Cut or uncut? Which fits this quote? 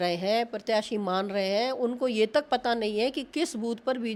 uncut